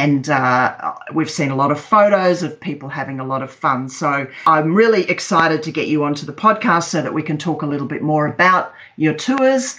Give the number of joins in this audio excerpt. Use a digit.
1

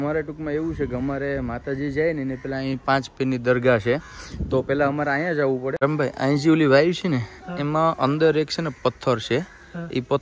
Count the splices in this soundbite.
1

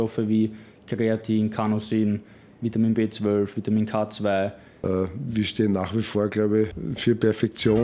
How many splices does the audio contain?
2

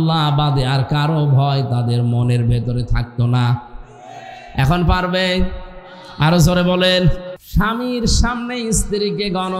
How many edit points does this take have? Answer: 1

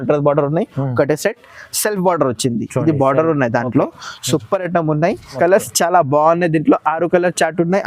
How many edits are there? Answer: 1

